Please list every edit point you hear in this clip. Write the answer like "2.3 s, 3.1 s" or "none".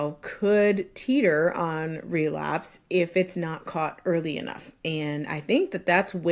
none